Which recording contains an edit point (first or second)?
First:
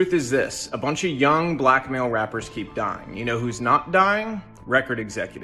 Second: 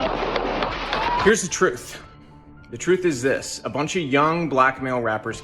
second